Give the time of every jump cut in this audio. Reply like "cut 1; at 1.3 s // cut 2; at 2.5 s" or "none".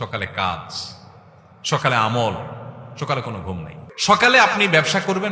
cut 1; at 3.8 s